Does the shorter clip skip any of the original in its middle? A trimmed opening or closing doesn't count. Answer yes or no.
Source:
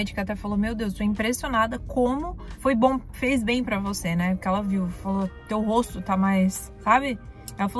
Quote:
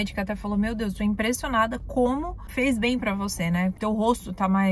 yes